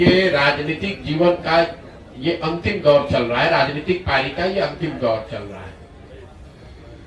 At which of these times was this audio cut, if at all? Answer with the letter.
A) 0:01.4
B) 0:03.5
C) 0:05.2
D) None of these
D